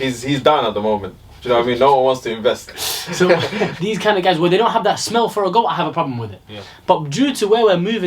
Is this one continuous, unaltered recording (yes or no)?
no